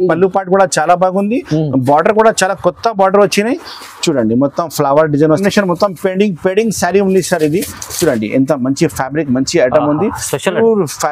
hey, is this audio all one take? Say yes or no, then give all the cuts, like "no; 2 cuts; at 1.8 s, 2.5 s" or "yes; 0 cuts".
no; 1 cut; at 5.4 s